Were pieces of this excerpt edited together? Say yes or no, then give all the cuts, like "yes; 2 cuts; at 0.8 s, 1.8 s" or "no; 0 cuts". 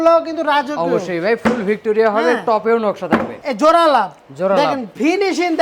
yes; 1 cut; at 3.3 s